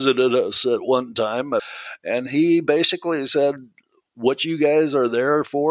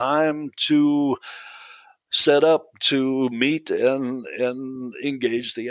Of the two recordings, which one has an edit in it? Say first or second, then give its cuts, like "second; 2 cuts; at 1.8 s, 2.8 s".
first; 1 cut; at 1.7 s